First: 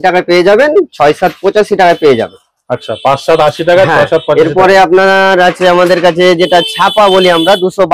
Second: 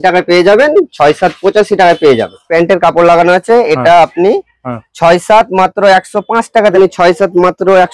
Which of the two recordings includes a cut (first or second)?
second